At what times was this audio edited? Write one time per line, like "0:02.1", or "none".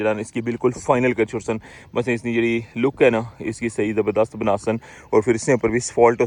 none